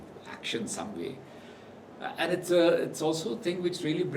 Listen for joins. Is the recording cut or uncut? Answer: uncut